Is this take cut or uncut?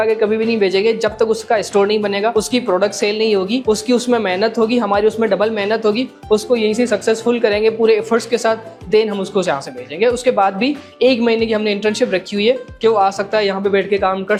uncut